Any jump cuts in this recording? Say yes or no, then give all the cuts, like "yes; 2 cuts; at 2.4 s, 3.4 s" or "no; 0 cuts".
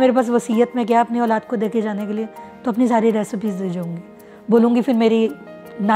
no; 0 cuts